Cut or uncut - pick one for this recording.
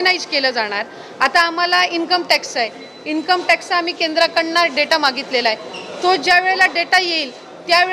uncut